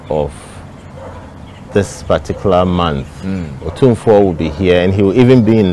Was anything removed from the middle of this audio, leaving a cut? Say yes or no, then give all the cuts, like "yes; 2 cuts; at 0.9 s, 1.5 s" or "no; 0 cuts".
no; 0 cuts